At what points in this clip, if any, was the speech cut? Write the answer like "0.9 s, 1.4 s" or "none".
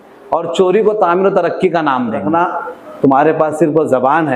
2.3 s